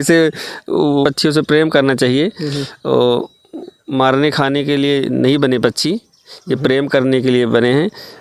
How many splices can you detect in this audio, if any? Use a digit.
1